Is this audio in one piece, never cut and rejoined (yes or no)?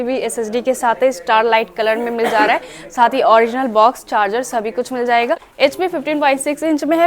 no